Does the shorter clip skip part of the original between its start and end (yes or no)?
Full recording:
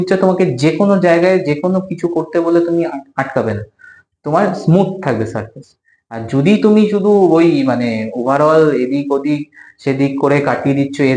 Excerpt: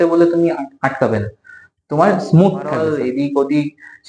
yes